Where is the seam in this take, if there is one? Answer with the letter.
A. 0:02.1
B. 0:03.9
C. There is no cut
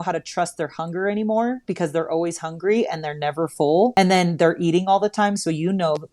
B